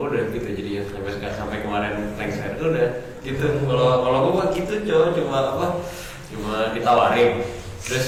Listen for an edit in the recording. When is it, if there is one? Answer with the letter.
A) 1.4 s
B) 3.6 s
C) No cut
C